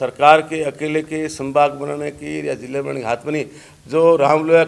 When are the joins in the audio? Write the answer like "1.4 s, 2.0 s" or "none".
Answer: none